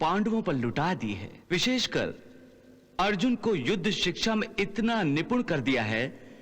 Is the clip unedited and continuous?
no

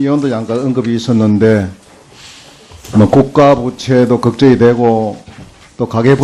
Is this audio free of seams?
yes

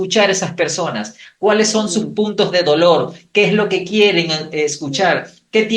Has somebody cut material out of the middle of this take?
no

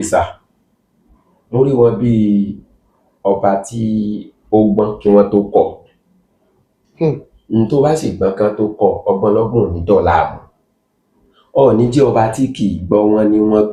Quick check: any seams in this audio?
no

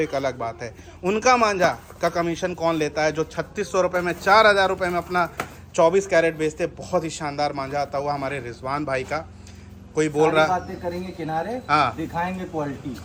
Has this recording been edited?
no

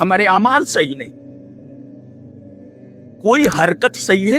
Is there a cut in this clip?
yes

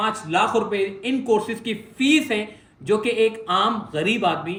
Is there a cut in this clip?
no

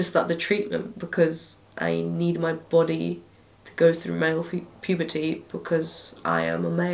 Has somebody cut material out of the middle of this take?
no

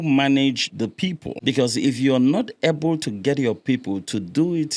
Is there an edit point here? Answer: yes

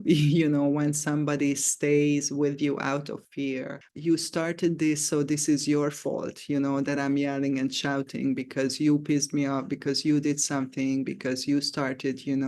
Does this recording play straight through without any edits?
no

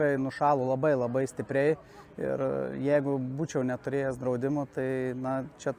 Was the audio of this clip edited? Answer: no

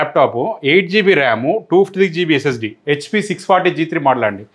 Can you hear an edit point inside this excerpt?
no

